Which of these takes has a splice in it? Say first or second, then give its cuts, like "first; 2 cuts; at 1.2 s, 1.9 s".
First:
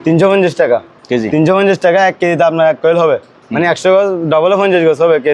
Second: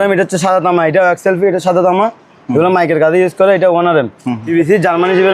second; 1 cut; at 4.4 s